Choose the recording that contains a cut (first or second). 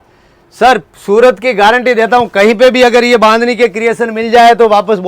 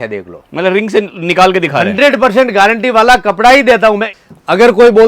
second